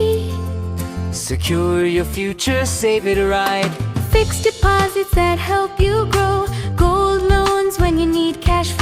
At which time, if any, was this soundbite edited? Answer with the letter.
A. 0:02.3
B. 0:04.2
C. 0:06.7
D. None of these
D